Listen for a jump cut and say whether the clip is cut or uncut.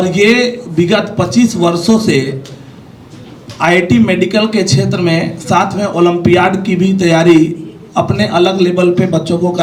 uncut